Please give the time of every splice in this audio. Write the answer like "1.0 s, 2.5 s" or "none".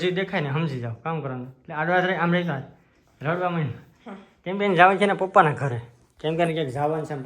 none